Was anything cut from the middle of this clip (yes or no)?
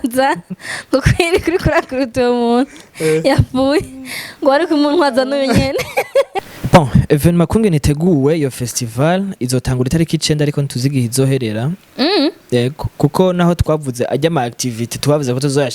yes